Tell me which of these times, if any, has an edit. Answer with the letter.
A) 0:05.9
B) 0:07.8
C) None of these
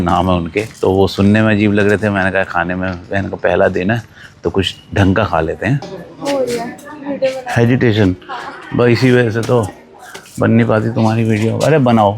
A